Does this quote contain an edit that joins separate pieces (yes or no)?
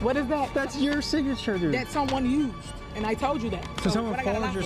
no